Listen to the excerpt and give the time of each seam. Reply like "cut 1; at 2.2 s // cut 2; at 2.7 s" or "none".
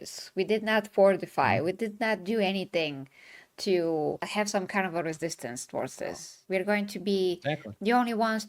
cut 1; at 6.3 s